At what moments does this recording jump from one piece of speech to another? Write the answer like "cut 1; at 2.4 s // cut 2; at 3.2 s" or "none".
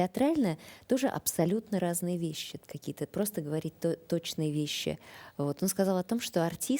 cut 1; at 2.5 s